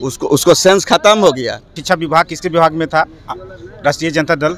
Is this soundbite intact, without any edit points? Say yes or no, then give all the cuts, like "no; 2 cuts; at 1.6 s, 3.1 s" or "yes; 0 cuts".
no; 1 cut; at 1.8 s